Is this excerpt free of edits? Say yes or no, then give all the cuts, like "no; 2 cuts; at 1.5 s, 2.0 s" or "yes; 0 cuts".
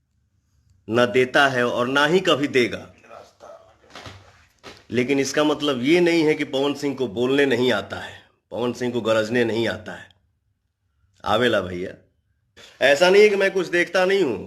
no; 1 cut; at 12.6 s